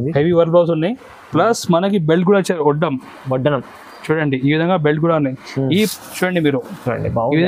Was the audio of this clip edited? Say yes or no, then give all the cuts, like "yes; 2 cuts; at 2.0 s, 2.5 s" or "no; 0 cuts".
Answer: yes; 1 cut; at 5.9 s